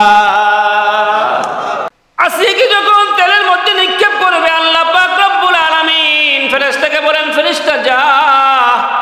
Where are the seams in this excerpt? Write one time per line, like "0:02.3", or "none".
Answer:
0:01.9